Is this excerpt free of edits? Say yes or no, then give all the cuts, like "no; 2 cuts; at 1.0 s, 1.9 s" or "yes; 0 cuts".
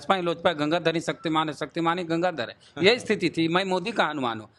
yes; 0 cuts